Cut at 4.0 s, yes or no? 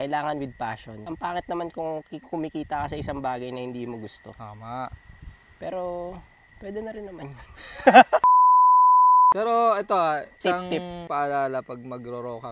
no